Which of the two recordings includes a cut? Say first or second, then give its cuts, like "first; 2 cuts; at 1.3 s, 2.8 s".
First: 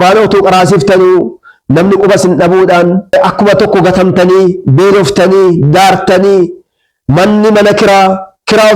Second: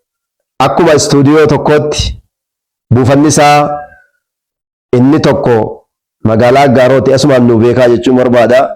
first; 1 cut; at 3.1 s